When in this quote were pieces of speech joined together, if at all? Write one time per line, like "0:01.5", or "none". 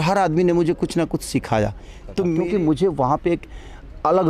0:02.4